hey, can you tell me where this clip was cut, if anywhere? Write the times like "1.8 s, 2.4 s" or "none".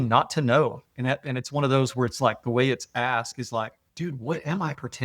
3.8 s